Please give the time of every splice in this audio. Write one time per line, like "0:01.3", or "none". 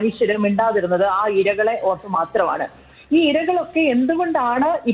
none